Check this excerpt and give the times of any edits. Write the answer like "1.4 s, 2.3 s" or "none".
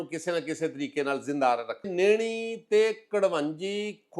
1.9 s